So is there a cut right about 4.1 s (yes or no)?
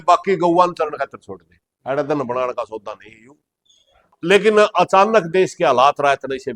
yes